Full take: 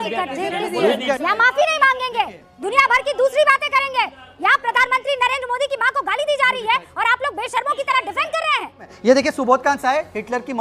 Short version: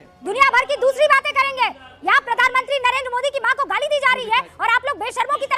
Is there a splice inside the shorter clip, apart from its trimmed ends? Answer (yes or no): no